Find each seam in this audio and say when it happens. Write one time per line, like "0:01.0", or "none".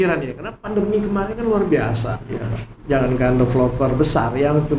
none

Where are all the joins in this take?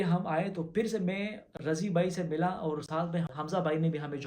0:03.4

